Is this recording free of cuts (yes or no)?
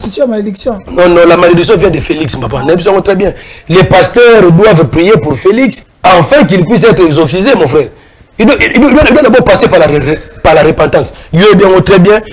no